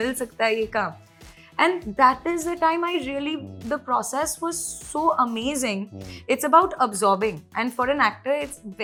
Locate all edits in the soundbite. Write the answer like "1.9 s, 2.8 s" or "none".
none